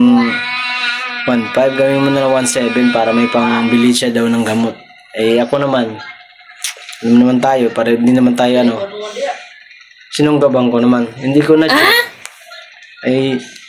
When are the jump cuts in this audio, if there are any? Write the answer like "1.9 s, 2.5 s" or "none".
none